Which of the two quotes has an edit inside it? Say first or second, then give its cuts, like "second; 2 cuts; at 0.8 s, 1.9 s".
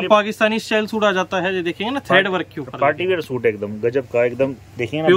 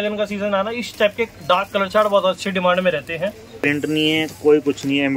second; 1 cut; at 3.6 s